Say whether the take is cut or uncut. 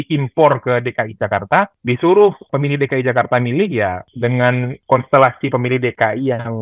cut